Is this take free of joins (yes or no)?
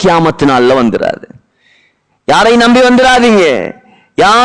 yes